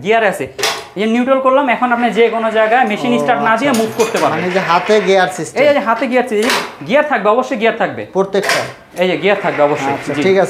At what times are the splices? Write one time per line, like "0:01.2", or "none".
none